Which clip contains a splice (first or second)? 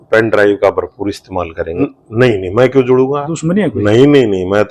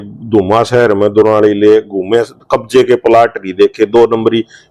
first